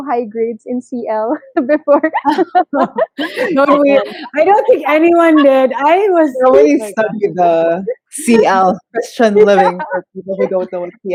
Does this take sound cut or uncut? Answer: uncut